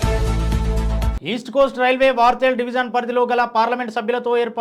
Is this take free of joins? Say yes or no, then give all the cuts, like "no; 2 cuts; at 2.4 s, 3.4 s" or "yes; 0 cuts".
no; 1 cut; at 1.1 s